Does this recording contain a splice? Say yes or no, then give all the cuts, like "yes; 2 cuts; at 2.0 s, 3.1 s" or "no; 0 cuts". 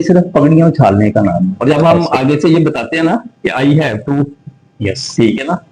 yes; 1 cut; at 1.5 s